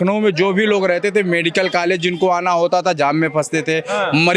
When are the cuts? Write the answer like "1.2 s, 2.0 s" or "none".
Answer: none